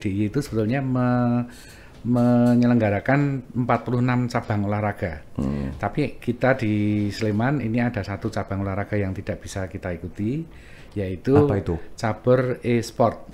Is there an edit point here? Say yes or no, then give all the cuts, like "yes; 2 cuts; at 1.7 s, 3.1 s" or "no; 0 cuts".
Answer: no; 0 cuts